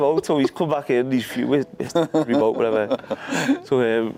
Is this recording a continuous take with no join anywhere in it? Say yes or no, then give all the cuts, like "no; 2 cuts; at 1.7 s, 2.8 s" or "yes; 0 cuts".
yes; 0 cuts